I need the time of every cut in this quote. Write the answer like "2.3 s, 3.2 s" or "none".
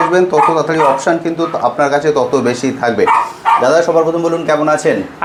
none